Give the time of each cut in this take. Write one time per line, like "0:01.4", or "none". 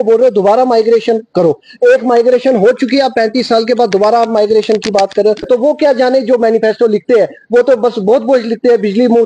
0:05.5